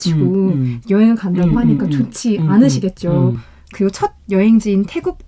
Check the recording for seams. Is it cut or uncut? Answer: cut